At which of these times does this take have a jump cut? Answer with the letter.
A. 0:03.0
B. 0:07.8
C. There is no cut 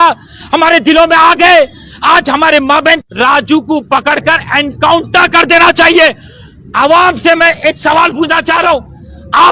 A